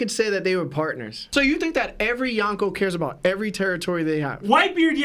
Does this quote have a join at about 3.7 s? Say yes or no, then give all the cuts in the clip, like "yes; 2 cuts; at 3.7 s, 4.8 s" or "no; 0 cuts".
no; 1 cut; at 1.3 s